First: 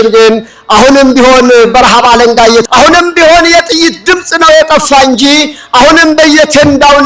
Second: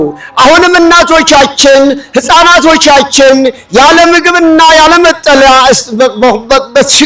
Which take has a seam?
first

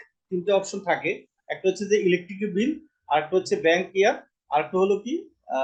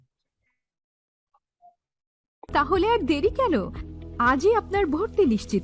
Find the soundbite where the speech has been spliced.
second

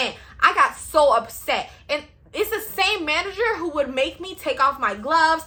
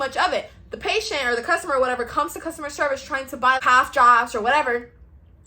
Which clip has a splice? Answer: second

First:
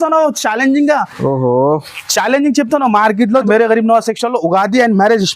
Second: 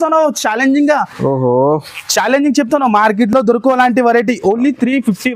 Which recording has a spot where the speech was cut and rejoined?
first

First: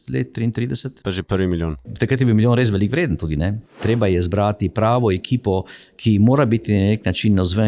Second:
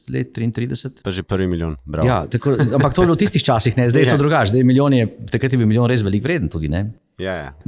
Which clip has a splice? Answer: first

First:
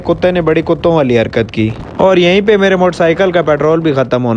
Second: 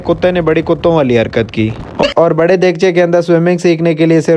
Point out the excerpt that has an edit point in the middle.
second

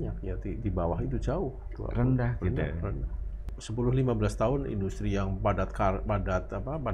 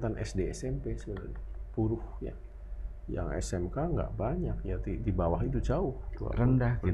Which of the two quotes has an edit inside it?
first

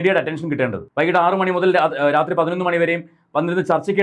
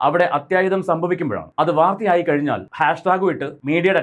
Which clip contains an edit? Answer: second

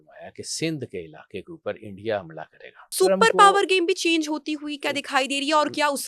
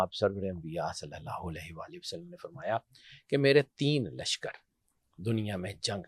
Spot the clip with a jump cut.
first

